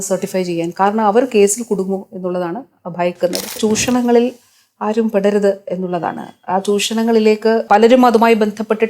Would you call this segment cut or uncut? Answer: cut